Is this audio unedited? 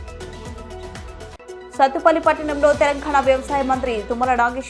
no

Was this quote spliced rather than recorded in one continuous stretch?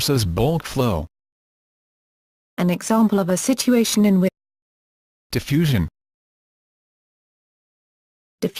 no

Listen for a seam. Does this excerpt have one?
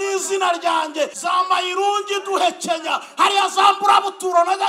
yes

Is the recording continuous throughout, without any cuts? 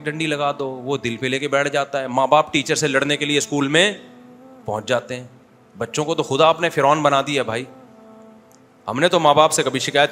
yes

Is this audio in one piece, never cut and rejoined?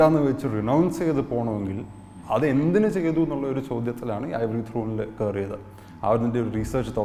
yes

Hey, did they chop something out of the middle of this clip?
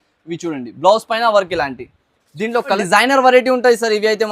yes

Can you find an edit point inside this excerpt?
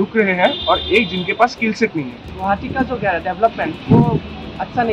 yes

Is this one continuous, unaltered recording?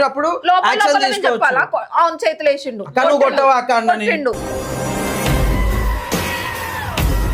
yes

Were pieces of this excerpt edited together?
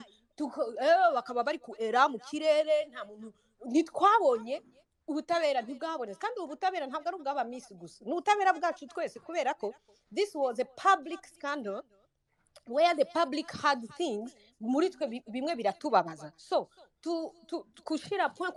no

